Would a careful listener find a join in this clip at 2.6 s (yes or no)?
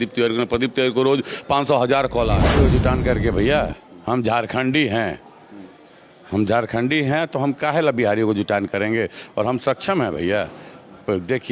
yes